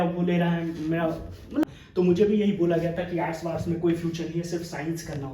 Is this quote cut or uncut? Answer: cut